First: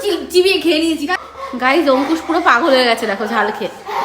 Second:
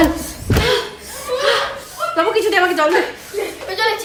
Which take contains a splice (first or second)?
first